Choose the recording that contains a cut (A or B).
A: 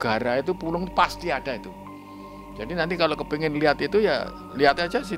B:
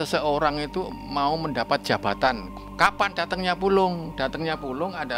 B